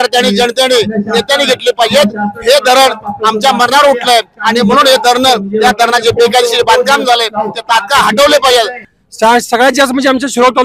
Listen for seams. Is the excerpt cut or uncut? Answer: cut